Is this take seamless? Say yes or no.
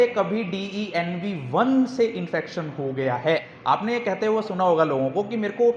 no